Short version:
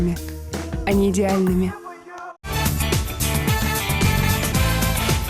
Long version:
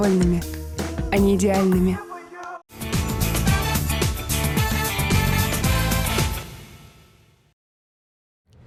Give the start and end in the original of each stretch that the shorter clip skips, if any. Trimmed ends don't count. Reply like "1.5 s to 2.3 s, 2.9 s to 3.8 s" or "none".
2.8 s to 3.6 s